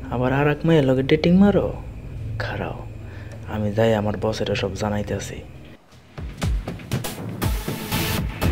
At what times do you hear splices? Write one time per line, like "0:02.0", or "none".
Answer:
0:05.9